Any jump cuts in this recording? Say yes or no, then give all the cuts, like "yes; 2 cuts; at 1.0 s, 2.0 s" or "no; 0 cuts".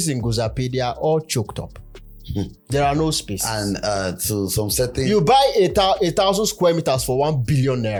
no; 0 cuts